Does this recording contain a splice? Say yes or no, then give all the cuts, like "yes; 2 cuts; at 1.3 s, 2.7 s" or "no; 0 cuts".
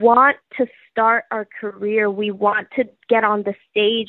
no; 0 cuts